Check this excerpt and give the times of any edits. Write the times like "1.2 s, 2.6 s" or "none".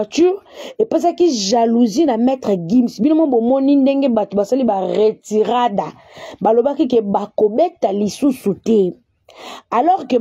none